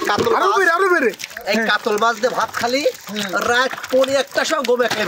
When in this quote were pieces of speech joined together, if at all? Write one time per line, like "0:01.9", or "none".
0:01.3